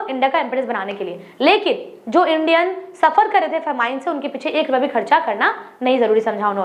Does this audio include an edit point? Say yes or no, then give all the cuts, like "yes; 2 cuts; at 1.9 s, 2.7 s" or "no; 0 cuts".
no; 0 cuts